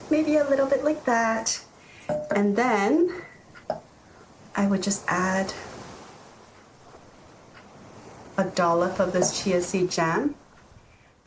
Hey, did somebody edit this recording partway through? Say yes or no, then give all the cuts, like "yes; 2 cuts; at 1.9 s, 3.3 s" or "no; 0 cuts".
no; 0 cuts